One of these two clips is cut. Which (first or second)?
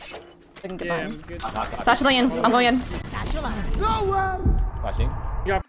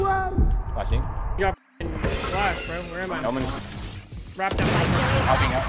second